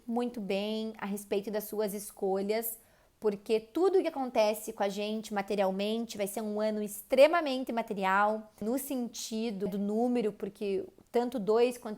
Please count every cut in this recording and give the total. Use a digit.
2